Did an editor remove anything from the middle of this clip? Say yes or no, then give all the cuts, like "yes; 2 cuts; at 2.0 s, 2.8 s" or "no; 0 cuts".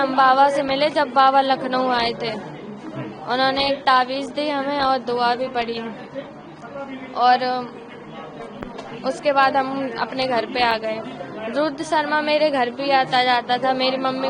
no; 0 cuts